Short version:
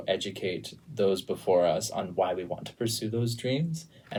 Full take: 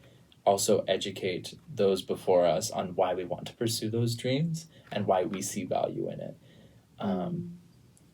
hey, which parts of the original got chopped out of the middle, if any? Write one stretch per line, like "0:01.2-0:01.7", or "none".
none